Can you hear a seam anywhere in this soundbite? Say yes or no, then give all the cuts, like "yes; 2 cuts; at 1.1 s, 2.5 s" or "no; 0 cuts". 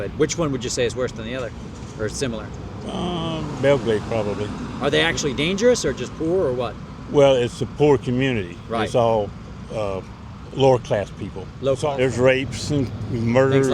yes; 1 cut; at 11.9 s